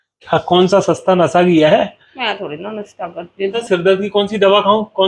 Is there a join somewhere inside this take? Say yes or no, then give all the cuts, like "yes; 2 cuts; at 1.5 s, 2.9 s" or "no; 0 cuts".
yes; 1 cut; at 3.6 s